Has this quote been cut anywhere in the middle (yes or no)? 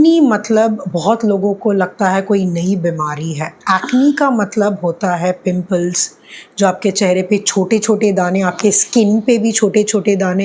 no